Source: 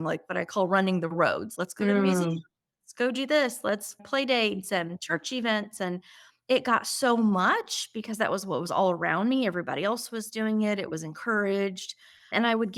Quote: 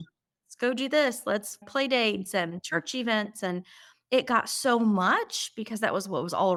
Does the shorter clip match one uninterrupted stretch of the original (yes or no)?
yes